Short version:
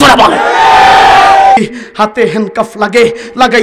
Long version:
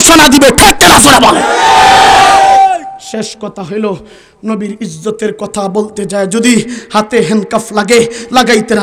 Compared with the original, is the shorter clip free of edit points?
no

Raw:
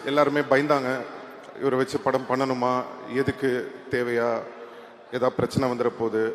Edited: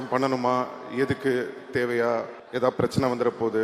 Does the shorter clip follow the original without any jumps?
no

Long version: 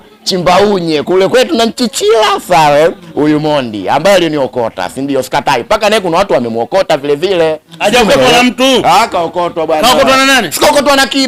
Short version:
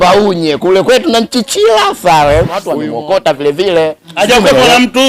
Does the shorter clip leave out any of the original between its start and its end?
yes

